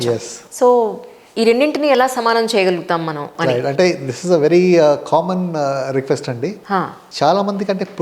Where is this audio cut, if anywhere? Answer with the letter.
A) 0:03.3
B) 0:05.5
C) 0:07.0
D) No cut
C